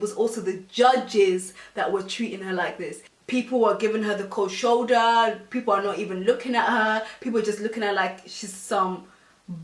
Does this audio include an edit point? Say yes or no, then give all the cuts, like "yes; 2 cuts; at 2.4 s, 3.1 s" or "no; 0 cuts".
no; 0 cuts